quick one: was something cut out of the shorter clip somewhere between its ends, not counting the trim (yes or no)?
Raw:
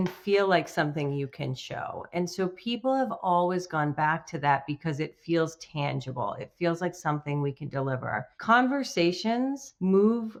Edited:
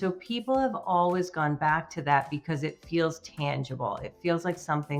no